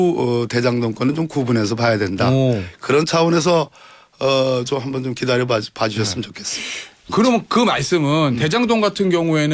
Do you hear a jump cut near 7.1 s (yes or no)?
yes